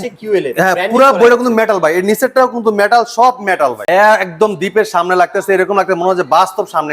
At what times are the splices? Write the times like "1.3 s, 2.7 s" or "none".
3.8 s